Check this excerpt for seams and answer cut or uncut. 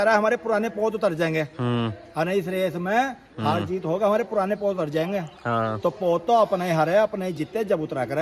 uncut